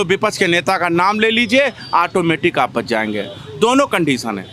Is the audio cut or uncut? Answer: uncut